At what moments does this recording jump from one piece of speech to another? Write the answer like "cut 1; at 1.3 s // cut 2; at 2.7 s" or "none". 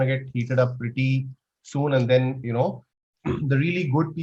cut 1; at 3.0 s